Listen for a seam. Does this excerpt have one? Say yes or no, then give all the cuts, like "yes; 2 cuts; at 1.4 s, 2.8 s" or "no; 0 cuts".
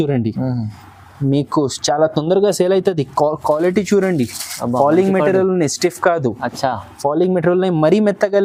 no; 0 cuts